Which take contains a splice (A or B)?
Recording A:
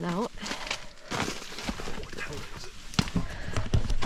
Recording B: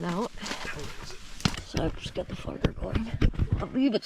B